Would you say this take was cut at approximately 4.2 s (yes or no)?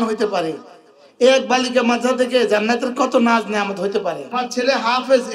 yes